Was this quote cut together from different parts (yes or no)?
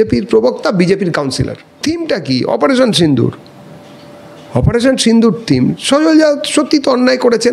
yes